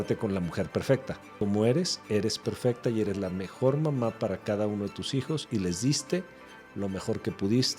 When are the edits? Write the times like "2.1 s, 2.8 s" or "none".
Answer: 1.3 s